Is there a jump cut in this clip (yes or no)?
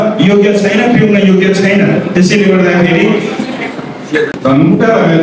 yes